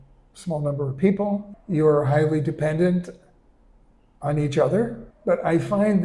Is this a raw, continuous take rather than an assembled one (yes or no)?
no